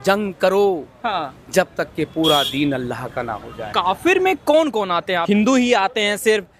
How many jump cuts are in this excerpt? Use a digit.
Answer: 2